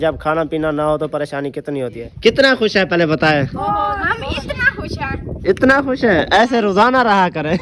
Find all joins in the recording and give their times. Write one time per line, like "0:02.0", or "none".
0:02.0